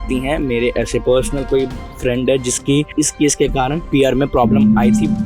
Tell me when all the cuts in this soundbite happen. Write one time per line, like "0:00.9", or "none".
0:01.0
0:03.8